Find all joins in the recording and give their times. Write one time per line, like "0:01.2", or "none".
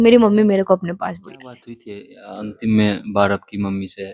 0:02.0